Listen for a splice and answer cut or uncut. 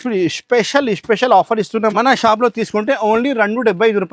cut